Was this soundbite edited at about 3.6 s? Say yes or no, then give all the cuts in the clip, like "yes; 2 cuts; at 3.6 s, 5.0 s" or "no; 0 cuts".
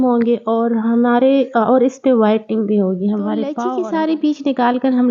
yes; 1 cut; at 3.6 s